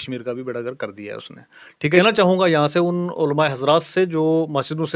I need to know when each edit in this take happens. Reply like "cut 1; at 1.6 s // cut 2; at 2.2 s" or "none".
cut 1; at 2.0 s